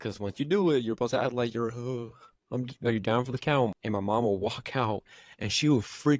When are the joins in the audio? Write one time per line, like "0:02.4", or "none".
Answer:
0:03.7

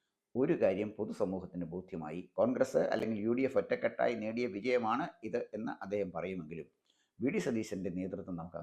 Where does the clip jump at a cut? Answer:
0:02.2

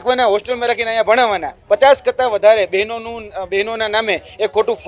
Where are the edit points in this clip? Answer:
0:01.5

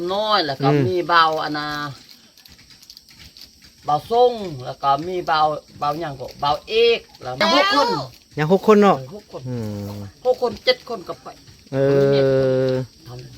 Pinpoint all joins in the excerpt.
0:07.4

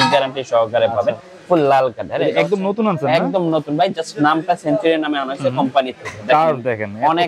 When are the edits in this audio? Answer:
none

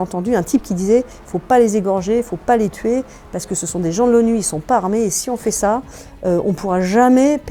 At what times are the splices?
none

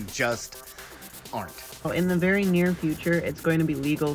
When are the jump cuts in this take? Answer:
0:01.9

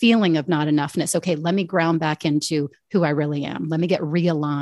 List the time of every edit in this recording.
none

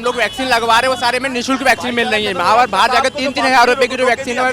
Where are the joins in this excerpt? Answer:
none

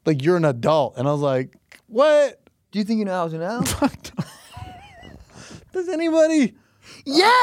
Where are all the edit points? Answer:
0:02.7

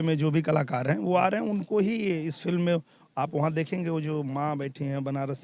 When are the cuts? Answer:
none

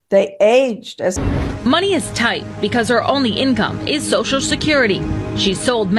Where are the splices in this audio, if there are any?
0:01.1

